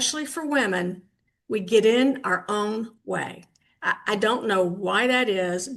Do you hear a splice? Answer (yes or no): no